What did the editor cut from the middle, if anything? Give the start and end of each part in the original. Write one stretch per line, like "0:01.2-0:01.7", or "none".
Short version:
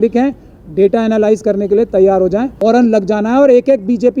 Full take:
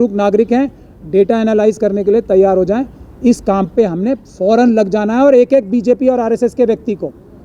0:02.9-0:04.4